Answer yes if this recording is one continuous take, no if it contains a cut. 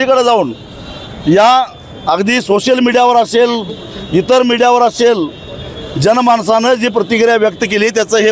yes